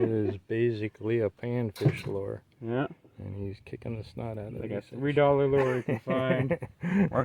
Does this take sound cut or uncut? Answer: uncut